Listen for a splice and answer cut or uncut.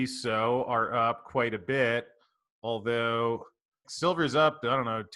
cut